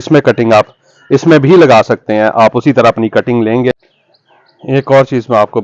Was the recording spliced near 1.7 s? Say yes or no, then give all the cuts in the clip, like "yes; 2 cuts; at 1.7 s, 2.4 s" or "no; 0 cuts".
no; 1 cut; at 3.7 s